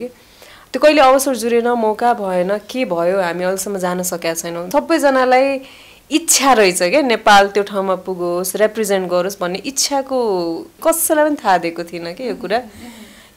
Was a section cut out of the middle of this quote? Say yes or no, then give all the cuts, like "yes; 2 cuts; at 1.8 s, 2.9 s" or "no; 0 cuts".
yes; 2 cuts; at 4.7 s, 10.7 s